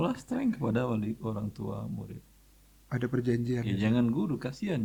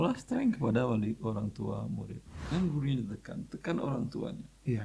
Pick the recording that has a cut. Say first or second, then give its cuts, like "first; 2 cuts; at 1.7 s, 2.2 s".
second; 1 cut; at 2.5 s